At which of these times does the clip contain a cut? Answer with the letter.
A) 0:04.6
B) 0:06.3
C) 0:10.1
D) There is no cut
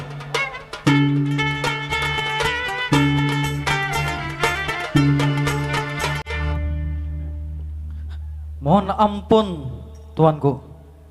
B